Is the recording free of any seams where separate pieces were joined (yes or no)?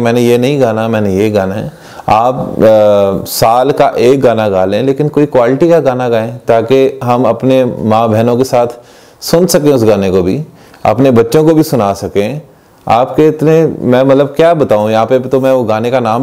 yes